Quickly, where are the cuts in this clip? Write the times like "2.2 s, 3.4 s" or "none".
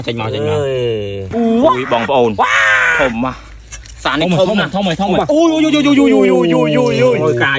1.3 s